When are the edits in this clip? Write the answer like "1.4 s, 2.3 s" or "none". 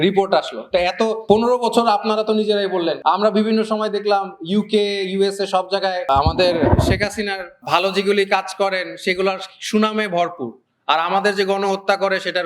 1.2 s, 3.0 s, 6.0 s, 7.5 s